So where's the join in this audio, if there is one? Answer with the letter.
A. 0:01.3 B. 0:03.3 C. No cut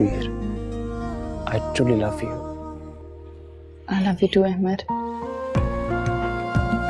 A